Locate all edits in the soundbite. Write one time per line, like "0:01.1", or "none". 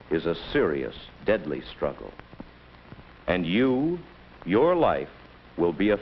0:02.9

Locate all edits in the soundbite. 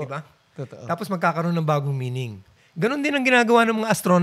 none

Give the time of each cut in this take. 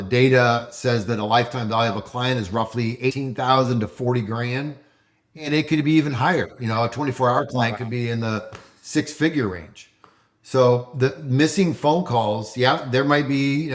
0:03.2

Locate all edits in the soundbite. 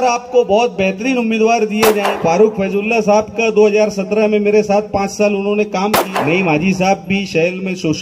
0:02.1
0:06.0

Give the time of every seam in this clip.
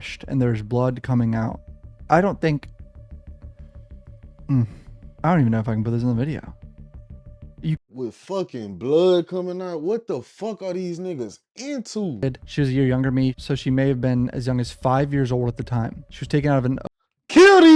0:12.2

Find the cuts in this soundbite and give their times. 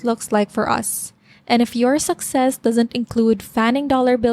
none

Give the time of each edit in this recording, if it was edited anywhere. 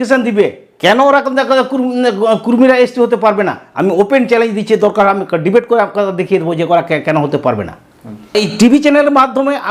0:08.3

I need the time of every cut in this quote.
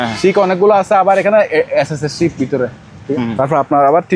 0:03.0

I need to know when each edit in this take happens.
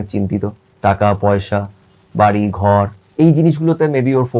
0:03.0

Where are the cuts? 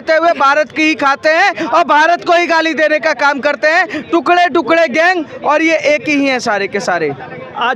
none

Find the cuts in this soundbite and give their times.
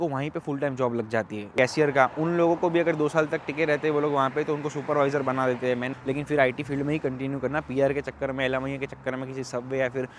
0:01.5
0:06.0

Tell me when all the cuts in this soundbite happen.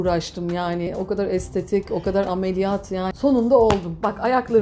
0:03.1

